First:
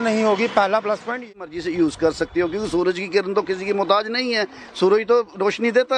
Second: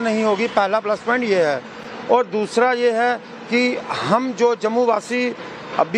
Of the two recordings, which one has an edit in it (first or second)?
first